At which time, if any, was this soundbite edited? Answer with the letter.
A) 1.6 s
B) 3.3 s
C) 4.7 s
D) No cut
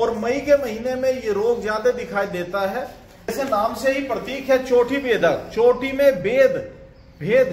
B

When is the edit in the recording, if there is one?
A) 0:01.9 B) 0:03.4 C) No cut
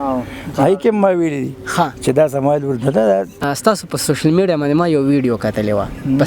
B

